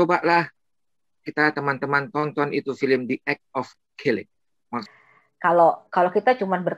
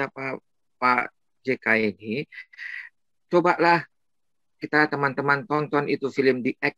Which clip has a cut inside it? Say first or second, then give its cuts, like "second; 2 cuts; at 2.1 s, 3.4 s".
first; 1 cut; at 4.8 s